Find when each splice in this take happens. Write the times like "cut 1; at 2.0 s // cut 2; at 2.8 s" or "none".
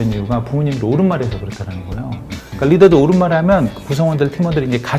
none